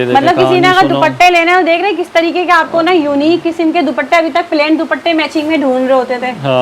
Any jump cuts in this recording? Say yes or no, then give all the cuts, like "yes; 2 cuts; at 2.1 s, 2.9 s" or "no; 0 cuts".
no; 0 cuts